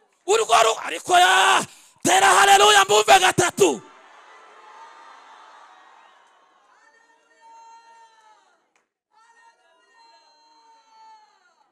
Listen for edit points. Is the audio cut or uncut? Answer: uncut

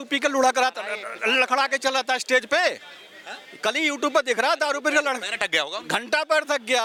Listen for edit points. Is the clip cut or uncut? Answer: uncut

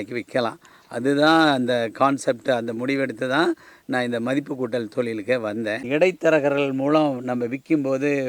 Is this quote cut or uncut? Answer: cut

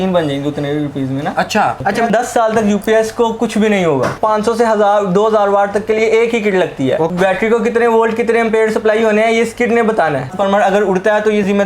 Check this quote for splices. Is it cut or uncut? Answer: cut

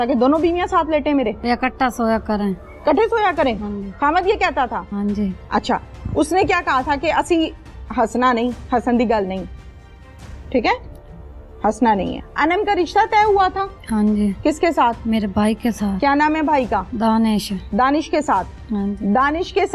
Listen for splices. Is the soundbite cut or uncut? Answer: cut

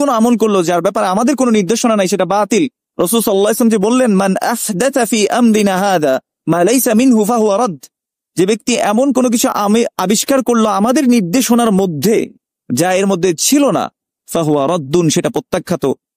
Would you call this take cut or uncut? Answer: uncut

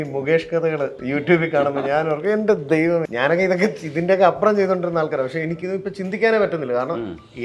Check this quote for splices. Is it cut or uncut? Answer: cut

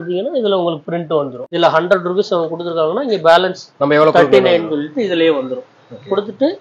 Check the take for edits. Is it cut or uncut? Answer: cut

